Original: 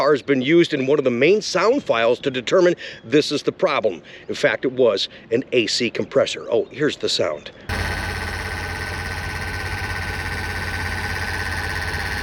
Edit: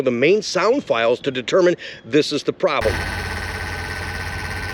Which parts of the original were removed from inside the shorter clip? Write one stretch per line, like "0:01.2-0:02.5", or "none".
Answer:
0:04.1-0:08.0